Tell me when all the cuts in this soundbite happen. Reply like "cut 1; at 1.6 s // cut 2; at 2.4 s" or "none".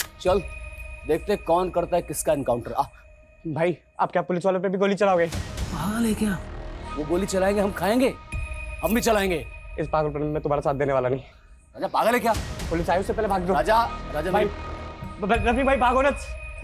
none

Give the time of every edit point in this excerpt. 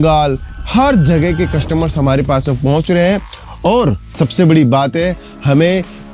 none

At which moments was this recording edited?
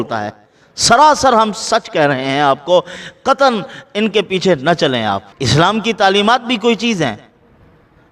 cut 1; at 5.3 s

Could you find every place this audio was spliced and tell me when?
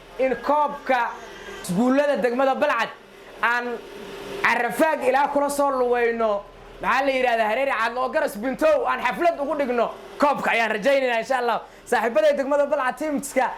cut 1; at 1.5 s

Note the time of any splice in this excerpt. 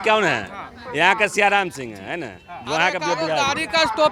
none

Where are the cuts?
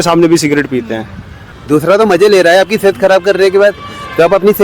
cut 1; at 1.5 s

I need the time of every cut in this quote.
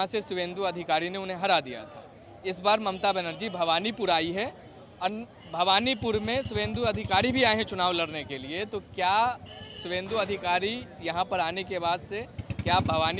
none

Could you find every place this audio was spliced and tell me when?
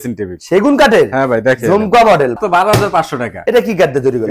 cut 1; at 2.4 s // cut 2; at 3.3 s

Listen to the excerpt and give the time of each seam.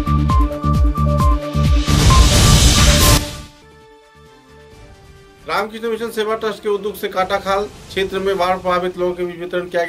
cut 1; at 3.3 s // cut 2; at 5.4 s

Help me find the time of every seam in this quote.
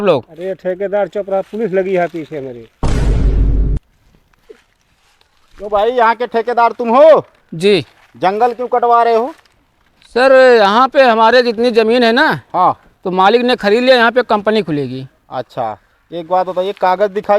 cut 1; at 2.7 s // cut 2; at 4.0 s

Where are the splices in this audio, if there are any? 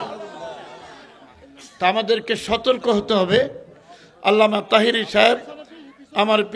none

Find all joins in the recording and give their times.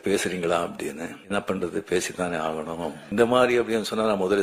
cut 1; at 1.1 s // cut 2; at 3.1 s

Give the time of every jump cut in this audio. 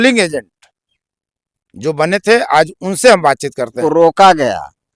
cut 1; at 3.8 s

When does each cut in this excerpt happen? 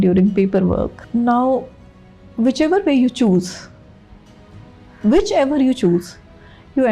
cut 1; at 1.0 s

